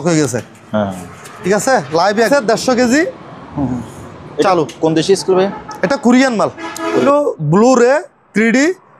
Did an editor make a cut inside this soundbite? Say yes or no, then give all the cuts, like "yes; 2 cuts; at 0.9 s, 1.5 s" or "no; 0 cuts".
yes; 2 cuts; at 2.3 s, 7.0 s